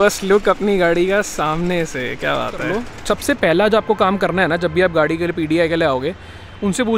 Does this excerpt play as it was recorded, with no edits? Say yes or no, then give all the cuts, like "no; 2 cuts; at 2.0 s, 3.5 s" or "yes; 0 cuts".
no; 1 cut; at 2.9 s